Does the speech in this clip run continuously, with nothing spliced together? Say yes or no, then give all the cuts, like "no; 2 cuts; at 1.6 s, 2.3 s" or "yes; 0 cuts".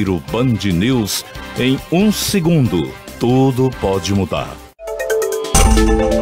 no; 1 cut; at 4.7 s